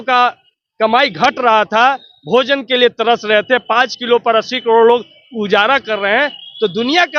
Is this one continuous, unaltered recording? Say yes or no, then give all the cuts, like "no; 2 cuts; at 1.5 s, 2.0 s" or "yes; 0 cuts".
yes; 0 cuts